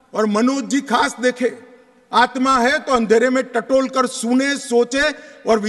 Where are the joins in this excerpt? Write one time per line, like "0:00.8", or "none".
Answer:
none